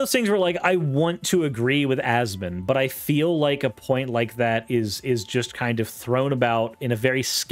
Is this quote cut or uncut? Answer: uncut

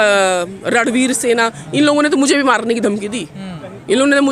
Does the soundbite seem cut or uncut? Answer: uncut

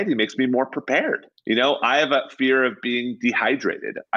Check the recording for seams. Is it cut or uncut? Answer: uncut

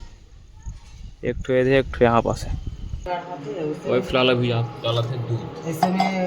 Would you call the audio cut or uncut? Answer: cut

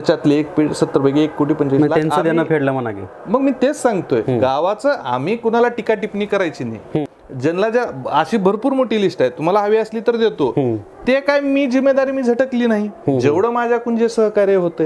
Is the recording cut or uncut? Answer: cut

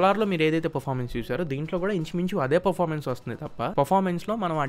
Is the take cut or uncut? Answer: cut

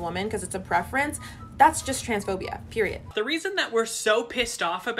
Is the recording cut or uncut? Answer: cut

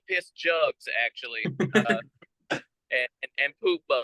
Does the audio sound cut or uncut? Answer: uncut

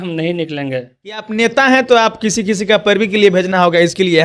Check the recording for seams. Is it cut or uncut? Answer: cut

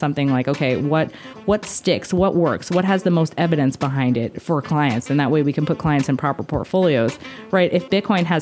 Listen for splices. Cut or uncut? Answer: uncut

